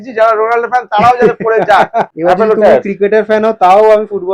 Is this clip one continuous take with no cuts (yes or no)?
no